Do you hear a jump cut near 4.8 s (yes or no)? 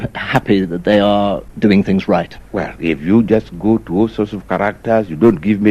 no